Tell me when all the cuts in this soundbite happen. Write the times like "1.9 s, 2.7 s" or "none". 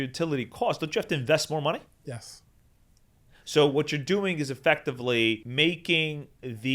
5.5 s